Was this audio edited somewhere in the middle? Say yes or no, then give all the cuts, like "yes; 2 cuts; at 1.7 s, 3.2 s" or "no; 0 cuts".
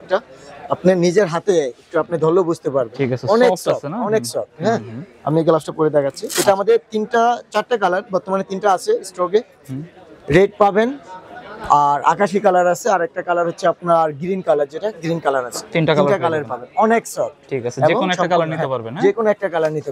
no; 0 cuts